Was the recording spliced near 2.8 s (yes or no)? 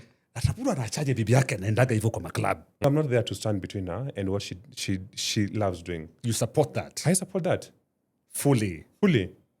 yes